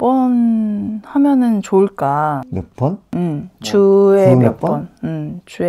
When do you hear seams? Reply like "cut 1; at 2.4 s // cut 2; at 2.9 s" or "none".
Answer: none